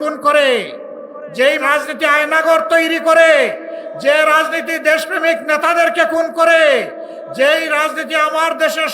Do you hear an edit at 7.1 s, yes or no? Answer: no